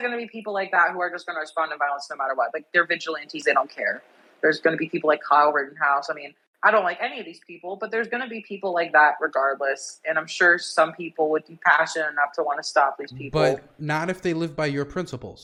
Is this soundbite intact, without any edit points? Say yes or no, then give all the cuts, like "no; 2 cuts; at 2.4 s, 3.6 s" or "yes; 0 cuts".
yes; 0 cuts